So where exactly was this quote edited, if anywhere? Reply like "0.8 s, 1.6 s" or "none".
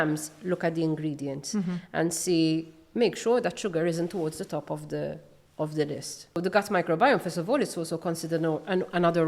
6.4 s